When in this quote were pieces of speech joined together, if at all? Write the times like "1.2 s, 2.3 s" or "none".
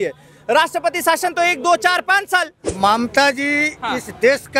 2.6 s